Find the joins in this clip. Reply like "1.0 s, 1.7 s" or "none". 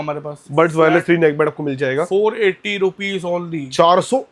none

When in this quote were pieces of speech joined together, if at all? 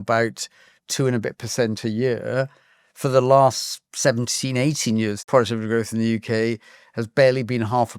5.2 s

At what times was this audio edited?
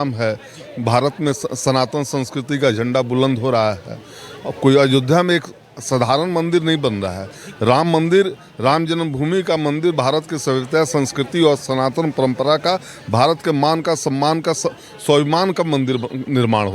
none

